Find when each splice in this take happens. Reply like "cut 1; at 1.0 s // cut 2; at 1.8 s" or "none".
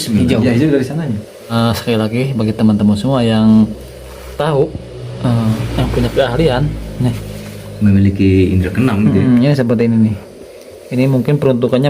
cut 1; at 1.5 s